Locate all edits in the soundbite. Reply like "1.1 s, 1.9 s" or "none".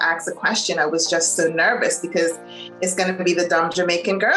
none